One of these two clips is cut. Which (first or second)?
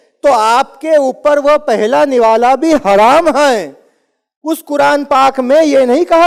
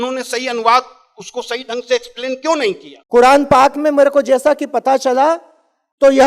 second